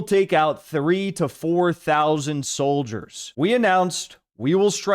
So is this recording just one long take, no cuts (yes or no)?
no